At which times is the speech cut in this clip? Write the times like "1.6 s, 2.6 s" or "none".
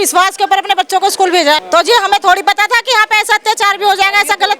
1.6 s